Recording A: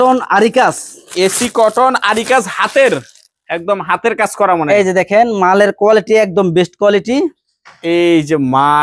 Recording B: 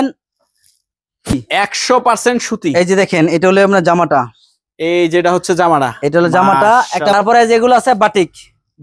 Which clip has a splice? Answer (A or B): B